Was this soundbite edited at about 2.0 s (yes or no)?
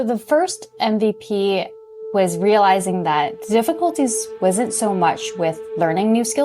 yes